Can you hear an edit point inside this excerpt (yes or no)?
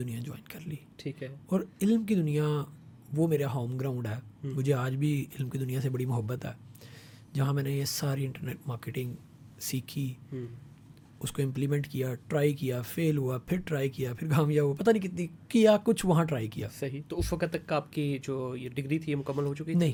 no